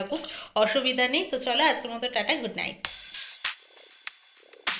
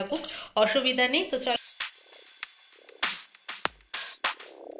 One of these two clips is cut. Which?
second; 1 cut; at 1.6 s

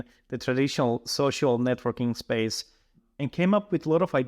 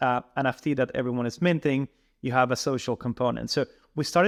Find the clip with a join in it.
first; 1 cut; at 3.0 s

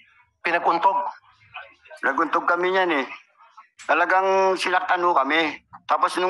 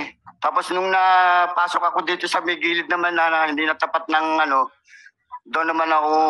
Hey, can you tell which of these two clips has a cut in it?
first; 1 cut; at 3.7 s

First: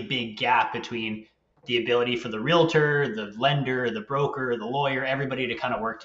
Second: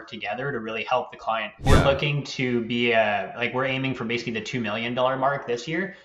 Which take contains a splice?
second; 1 cut; at 1.7 s

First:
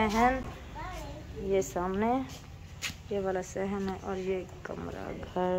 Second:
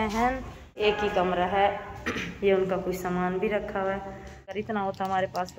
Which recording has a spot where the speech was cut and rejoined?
second; 2 cuts; at 1.1 s, 4.6 s

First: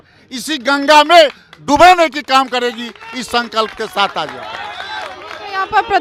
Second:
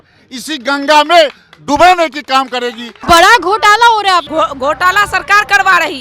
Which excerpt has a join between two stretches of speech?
second; 1 cut; at 2.9 s

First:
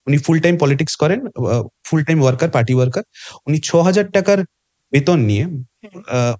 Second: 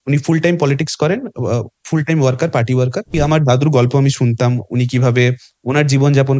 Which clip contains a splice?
second; 1 cut; at 3.1 s

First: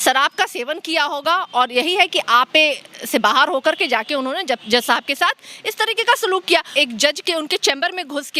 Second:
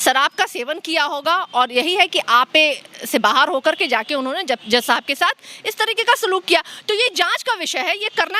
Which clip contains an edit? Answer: first; 1 cut; at 6.7 s

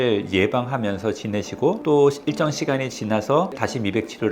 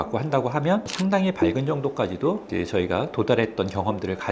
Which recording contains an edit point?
first; 2 cuts; at 1.8 s, 3.6 s

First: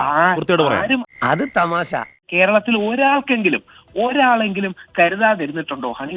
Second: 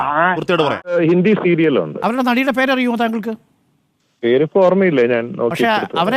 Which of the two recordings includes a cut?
second; 1 cut; at 0.9 s

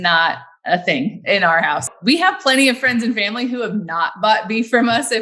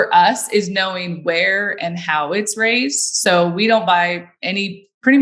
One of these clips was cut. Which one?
first; 1 cut; at 1.9 s

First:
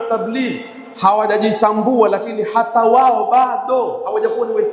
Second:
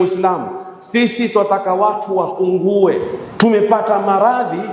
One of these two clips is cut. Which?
second; 1 cut; at 3.2 s

